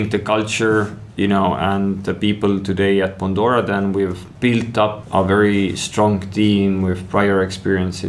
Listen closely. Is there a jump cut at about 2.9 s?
no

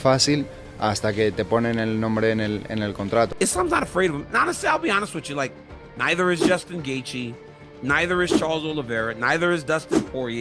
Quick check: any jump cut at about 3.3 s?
yes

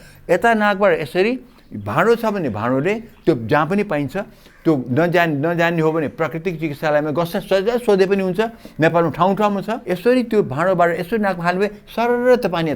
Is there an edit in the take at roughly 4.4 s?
no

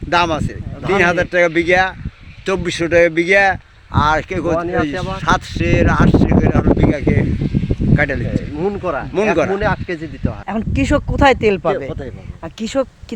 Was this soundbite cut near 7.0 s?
no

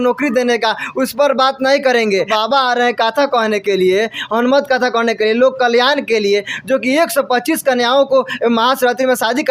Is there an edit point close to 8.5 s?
no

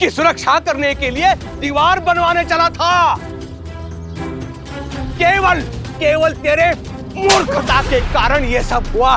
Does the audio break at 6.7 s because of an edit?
no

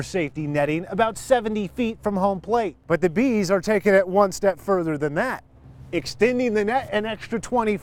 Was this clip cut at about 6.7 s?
no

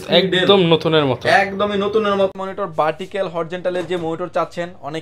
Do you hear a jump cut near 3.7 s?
no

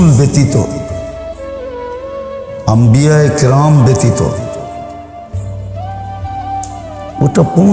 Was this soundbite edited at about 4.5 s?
no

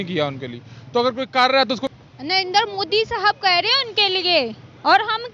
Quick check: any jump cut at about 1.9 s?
yes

